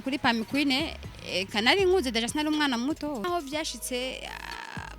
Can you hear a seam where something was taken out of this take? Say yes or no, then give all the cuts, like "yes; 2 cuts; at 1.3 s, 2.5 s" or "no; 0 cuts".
yes; 1 cut; at 3.2 s